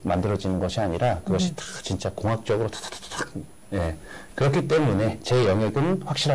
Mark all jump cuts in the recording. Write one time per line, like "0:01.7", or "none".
none